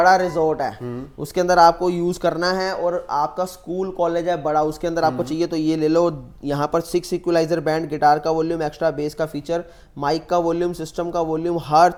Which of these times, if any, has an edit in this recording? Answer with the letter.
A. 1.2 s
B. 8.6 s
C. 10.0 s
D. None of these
D